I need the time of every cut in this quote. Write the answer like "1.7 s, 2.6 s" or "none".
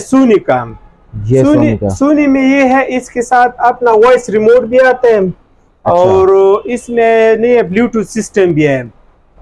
none